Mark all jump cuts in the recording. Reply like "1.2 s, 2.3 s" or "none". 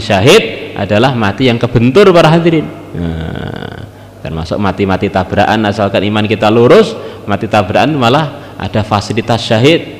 none